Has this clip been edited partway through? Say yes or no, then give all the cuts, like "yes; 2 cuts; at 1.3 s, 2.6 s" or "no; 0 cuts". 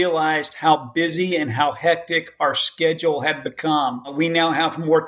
yes; 1 cut; at 4.1 s